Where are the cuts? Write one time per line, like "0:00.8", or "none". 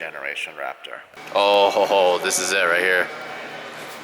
0:01.2

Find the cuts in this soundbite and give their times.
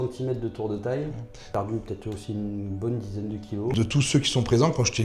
0:01.4
0:03.7

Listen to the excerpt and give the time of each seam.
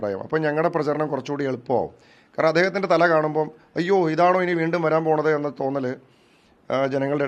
none

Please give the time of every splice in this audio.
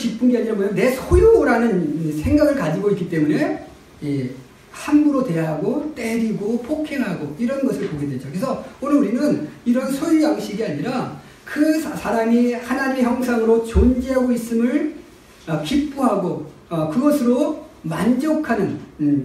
none

